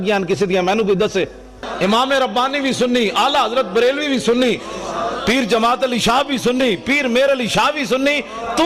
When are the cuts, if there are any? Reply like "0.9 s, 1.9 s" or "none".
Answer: 1.6 s